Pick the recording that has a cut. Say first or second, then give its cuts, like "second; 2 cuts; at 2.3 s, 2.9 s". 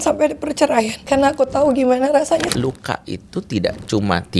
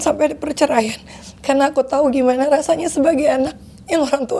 first; 2 cuts; at 1.0 s, 2.5 s